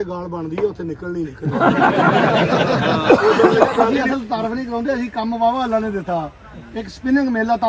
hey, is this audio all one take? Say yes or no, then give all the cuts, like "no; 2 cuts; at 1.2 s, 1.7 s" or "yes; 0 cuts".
no; 1 cut; at 4.0 s